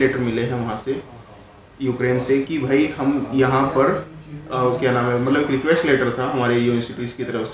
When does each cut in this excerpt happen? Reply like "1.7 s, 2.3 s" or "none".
none